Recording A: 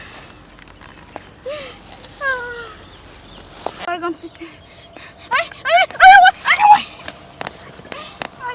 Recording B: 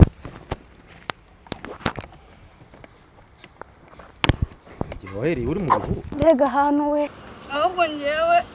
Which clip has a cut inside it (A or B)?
B